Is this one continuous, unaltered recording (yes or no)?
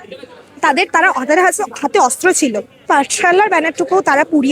no